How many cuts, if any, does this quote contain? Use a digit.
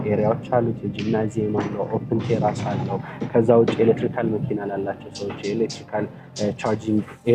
0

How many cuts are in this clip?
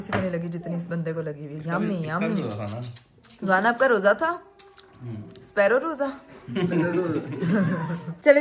0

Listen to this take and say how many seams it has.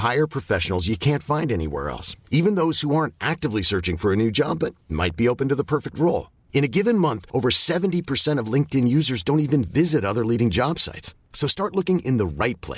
0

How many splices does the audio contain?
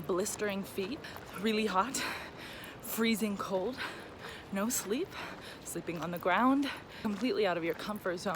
2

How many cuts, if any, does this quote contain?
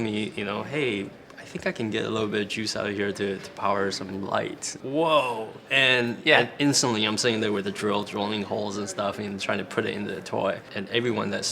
2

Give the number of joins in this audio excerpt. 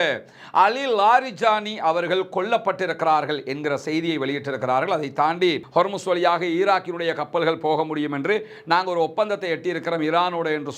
1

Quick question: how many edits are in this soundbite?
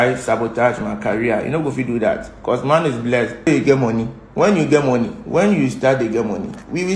1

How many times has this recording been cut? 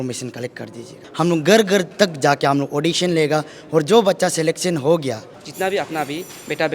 2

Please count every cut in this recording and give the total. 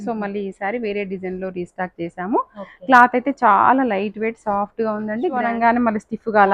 1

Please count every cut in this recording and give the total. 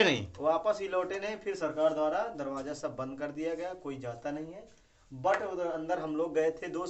0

